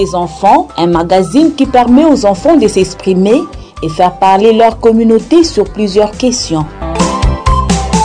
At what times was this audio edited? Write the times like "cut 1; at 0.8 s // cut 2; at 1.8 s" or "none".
cut 1; at 6.8 s